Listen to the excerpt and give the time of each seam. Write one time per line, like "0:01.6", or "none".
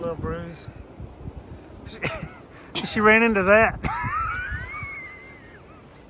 none

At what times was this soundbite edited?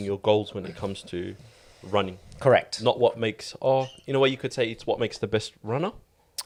none

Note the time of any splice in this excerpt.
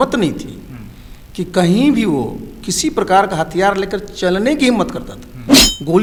none

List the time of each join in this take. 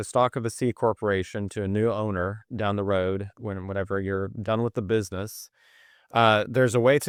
none

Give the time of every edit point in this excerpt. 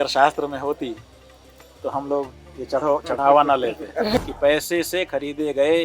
0:04.2

